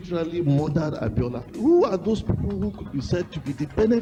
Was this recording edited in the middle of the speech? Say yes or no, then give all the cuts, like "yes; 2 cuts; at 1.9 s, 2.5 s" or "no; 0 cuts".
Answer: no; 0 cuts